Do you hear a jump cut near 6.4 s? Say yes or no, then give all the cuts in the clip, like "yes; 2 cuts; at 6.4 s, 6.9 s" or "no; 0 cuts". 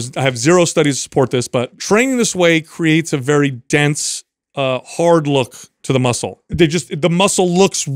yes; 2 cuts; at 1.7 s, 6.4 s